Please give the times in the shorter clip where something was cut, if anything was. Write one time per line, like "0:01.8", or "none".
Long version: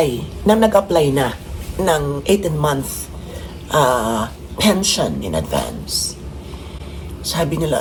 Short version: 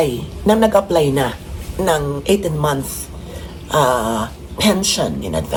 none